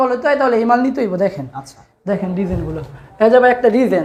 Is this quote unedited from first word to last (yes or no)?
yes